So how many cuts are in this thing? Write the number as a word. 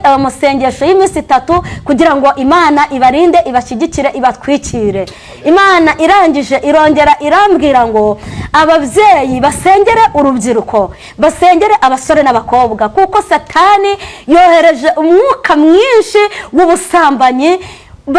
zero